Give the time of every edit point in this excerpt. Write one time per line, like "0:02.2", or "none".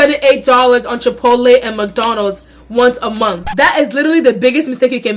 0:03.5